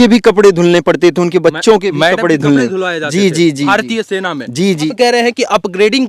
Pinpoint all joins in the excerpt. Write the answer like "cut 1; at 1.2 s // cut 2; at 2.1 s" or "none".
cut 1; at 4.9 s